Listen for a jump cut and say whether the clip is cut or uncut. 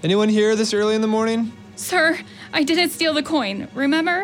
cut